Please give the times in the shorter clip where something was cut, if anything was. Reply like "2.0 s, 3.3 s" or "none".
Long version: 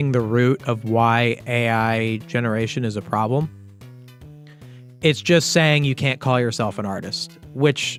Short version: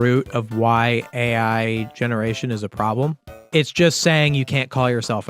3.3 s